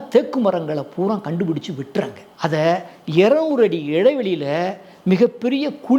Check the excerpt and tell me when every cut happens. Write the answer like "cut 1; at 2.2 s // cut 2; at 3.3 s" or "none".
cut 1; at 2.2 s